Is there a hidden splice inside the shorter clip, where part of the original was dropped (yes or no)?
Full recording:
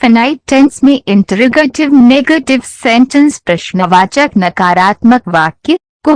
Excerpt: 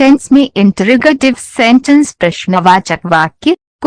yes